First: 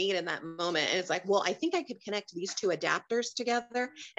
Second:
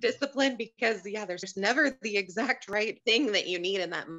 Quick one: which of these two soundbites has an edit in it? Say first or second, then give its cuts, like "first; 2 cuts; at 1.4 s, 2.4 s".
second; 2 cuts; at 1.4 s, 2.6 s